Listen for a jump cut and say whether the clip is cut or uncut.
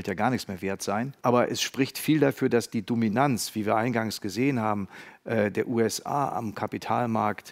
cut